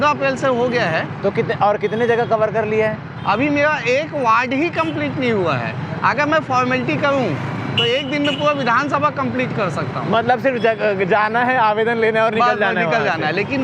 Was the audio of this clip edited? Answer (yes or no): no